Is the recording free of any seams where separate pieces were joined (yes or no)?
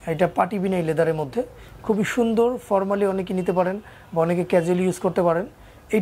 yes